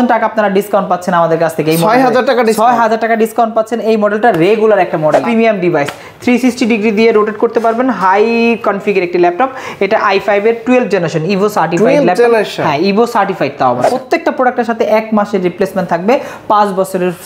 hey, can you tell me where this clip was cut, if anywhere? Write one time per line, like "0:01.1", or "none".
0:05.2
0:13.9